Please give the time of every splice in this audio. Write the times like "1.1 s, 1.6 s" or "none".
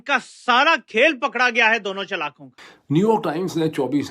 2.8 s

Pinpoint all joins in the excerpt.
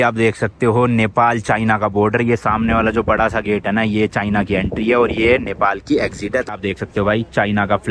6.5 s

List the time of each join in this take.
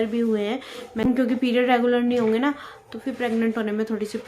1.1 s

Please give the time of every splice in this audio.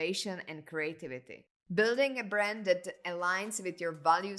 1.6 s

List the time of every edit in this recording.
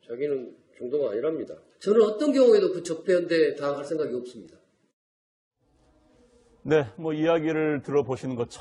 7.0 s

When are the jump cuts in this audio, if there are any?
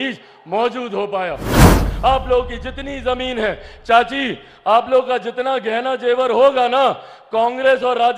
1.7 s

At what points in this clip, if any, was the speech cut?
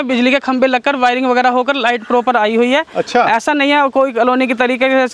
none

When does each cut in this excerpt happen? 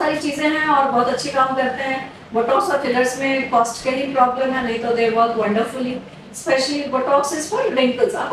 none

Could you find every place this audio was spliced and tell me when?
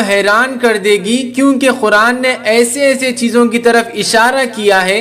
none

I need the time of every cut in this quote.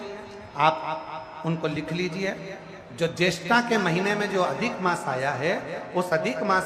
none

